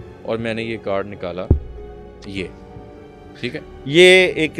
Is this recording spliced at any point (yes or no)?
no